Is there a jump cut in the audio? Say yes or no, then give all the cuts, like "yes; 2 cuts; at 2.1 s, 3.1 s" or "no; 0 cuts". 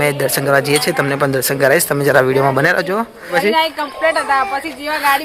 yes; 1 cut; at 3.4 s